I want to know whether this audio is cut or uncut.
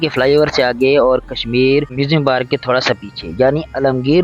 cut